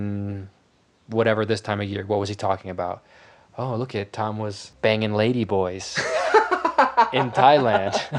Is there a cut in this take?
yes; 1 cut; at 4.6 s

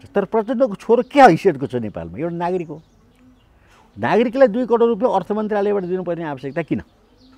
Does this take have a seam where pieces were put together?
no; 0 cuts

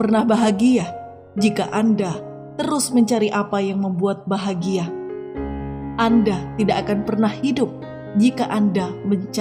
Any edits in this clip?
no; 0 cuts

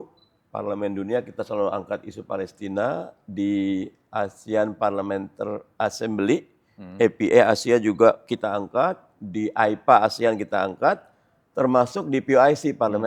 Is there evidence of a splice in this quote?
no; 0 cuts

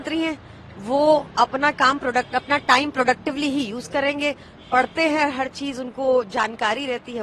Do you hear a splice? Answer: no; 0 cuts

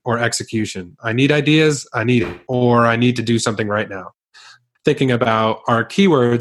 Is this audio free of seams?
no; 1 cut; at 4.6 s

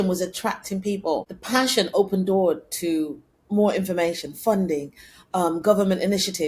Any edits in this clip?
yes; 1 cut; at 1.3 s

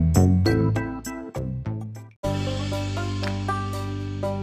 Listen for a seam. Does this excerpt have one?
yes; 1 cut; at 2.0 s

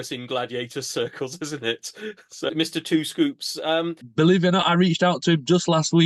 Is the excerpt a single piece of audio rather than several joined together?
no; 2 cuts; at 2.4 s, 4.0 s

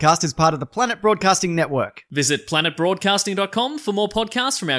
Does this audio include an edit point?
no; 0 cuts

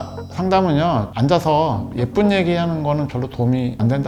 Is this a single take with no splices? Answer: yes; 0 cuts

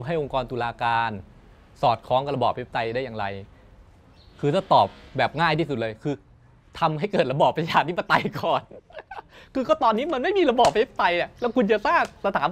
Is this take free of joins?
yes; 0 cuts

